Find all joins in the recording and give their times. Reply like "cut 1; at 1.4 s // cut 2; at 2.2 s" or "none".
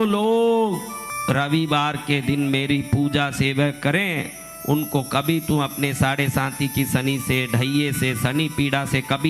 cut 1; at 1.1 s